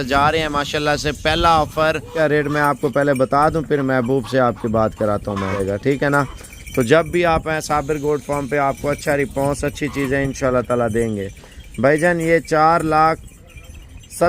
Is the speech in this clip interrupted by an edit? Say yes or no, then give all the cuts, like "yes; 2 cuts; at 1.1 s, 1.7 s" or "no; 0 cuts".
yes; 2 cuts; at 2.1 s, 5.6 s